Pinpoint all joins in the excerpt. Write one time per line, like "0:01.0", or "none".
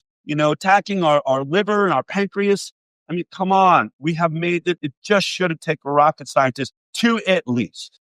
0:04.8

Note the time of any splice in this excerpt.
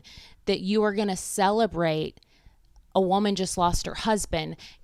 none

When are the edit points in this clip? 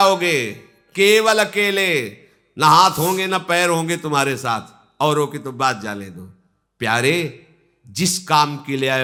none

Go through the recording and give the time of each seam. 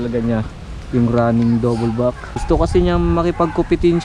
0:02.3

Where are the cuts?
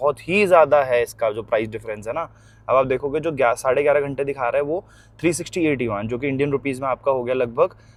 none

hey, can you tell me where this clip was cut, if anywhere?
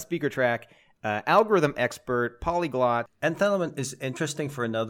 0:03.2

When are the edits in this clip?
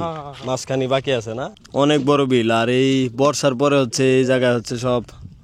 0:01.5

